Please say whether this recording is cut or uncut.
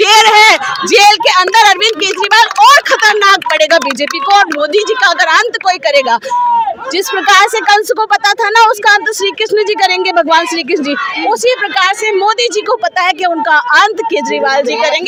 uncut